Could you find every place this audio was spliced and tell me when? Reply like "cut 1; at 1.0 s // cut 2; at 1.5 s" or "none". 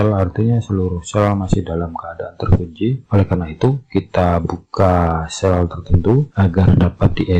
none